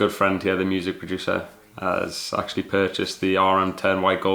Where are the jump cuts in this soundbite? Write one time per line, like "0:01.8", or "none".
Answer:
none